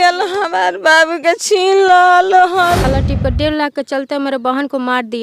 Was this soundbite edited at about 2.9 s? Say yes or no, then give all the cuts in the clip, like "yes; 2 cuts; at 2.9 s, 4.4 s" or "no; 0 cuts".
yes; 1 cut; at 2.9 s